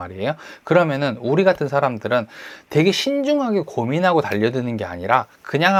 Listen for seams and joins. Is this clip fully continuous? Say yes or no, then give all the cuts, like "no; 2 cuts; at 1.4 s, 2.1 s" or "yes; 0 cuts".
yes; 0 cuts